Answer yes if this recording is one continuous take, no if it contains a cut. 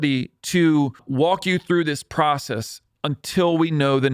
no